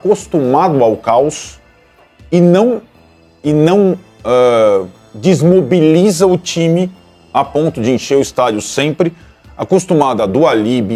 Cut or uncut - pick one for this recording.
uncut